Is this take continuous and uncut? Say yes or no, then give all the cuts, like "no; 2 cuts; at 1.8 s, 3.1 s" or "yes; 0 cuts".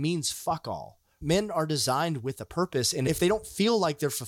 no; 2 cuts; at 1.2 s, 3.1 s